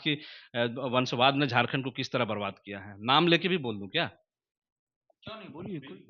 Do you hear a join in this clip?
no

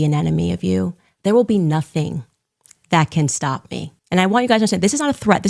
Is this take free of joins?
no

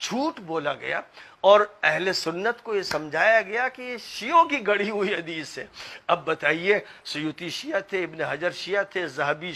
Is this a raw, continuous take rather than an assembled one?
yes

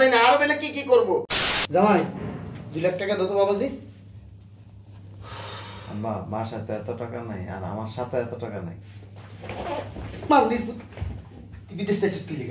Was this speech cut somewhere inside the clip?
yes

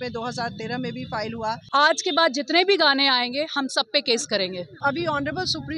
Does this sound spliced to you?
yes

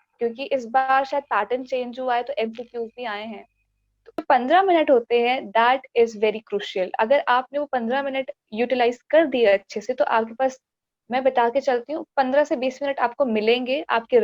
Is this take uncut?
no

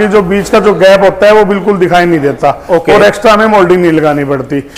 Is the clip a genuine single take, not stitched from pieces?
yes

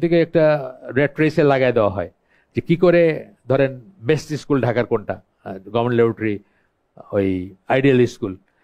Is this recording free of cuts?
yes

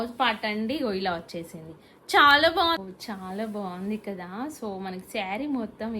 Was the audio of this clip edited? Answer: yes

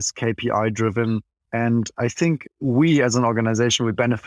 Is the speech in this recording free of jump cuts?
no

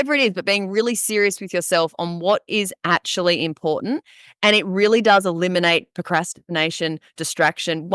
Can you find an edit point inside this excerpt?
no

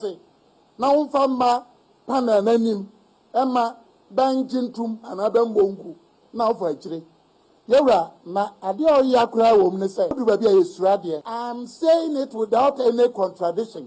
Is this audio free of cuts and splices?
no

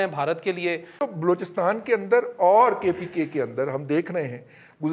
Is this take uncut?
no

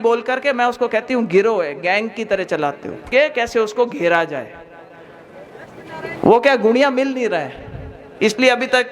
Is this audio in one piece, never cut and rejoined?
no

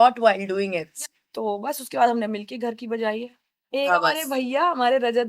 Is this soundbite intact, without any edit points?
no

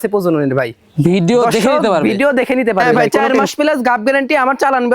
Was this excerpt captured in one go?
no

